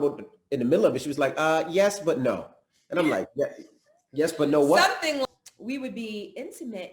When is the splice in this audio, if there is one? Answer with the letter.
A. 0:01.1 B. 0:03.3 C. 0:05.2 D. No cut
C